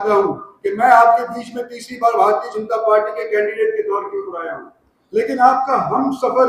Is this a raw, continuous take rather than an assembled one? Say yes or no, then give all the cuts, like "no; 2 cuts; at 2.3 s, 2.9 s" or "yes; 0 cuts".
yes; 0 cuts